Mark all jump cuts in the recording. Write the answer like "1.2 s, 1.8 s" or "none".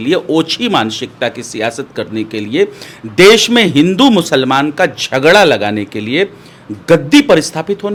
none